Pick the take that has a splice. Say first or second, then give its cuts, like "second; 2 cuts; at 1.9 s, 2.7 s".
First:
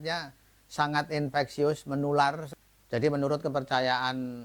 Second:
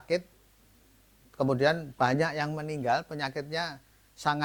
first; 1 cut; at 2.5 s